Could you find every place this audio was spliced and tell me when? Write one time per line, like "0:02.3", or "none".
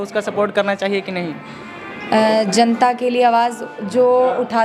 none